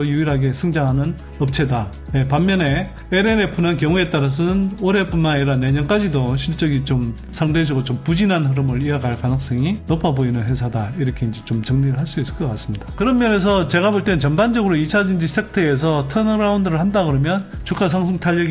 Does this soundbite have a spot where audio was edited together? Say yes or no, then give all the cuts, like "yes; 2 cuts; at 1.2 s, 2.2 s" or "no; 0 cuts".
yes; 1 cut; at 12.9 s